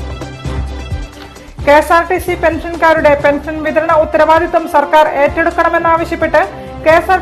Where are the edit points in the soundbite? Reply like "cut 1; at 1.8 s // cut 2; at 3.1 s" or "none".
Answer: none